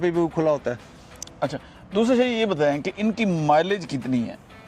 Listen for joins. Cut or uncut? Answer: uncut